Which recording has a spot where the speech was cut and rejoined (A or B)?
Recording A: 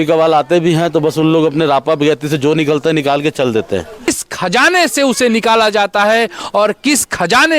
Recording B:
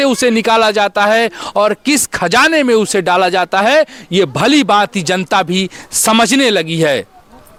A